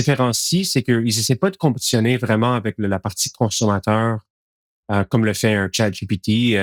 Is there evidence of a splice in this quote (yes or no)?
no